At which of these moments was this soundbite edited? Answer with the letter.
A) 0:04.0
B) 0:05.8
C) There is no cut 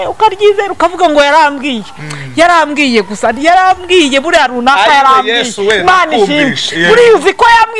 C